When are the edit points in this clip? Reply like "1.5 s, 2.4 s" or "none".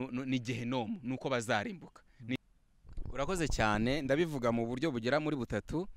2.4 s